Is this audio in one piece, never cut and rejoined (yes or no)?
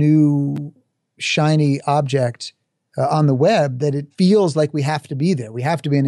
no